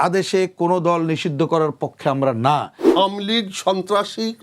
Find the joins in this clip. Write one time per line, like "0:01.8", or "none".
0:02.8